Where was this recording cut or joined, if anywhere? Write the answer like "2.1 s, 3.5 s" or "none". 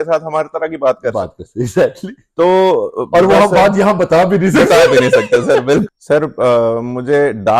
5.8 s